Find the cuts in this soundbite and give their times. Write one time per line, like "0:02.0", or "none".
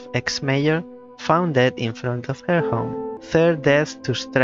0:03.2